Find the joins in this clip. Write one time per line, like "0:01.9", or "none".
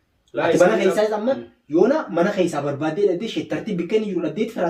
none